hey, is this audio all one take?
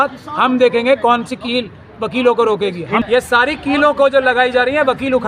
no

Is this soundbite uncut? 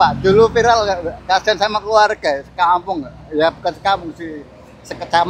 yes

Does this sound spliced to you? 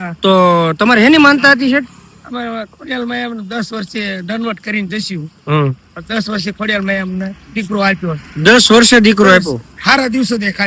no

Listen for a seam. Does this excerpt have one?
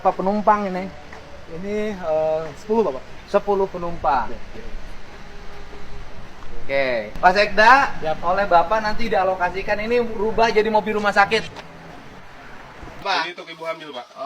yes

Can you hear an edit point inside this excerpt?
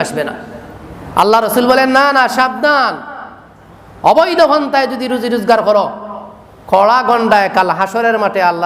no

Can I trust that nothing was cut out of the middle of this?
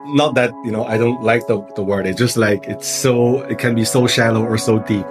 yes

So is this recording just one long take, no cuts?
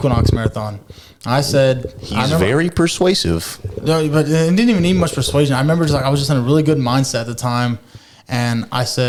yes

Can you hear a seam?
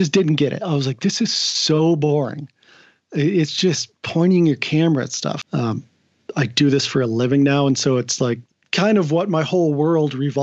yes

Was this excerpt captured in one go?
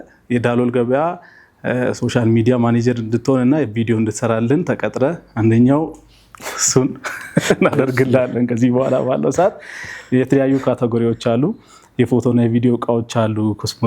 yes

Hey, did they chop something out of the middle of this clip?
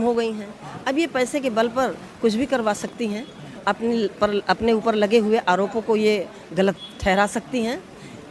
no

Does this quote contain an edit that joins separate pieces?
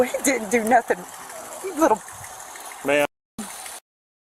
no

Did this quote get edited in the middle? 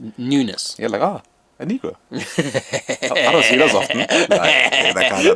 no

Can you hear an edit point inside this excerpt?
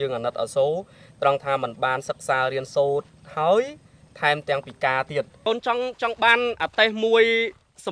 yes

